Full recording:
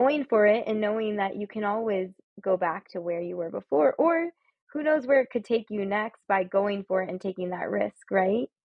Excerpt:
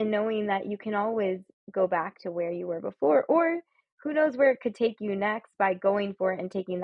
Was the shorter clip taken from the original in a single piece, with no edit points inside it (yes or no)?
yes